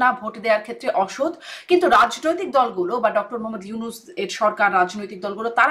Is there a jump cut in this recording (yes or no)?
no